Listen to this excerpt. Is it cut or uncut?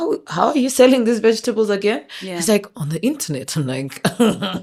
uncut